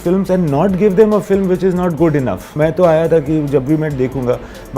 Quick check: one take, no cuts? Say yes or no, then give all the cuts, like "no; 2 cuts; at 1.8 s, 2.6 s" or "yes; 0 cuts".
no; 1 cut; at 2.5 s